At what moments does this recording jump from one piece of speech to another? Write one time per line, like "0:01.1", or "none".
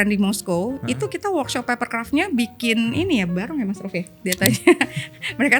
0:04.2